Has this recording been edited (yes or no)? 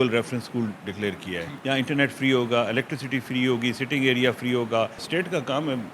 yes